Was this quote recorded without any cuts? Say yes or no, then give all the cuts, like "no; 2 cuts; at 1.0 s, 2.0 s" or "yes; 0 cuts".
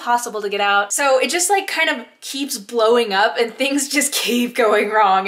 no; 1 cut; at 0.9 s